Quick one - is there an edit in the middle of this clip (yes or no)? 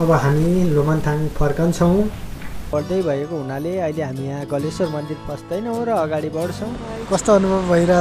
yes